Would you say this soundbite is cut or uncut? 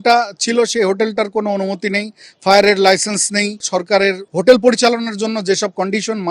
cut